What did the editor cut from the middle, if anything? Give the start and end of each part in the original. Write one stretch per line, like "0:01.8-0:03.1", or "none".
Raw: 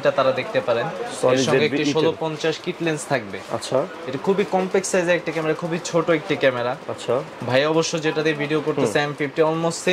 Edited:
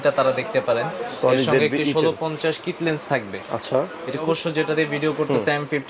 0:04.2-0:07.7